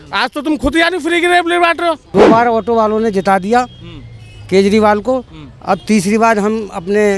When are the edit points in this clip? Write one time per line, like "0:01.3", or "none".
0:02.0